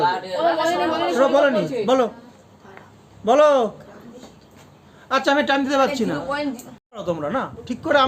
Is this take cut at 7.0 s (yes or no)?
yes